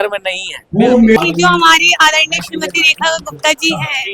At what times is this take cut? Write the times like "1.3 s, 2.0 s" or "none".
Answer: 1.2 s